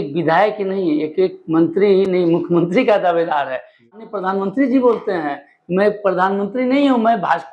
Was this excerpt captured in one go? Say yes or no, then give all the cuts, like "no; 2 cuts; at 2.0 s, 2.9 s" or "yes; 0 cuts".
no; 1 cut; at 4.1 s